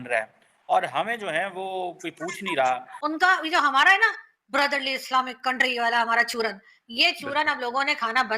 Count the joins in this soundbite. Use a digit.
1